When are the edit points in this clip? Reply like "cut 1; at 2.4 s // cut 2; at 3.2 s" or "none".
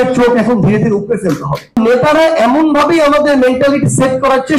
cut 1; at 1.8 s